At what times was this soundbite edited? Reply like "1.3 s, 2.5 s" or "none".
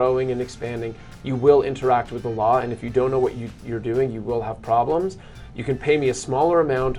none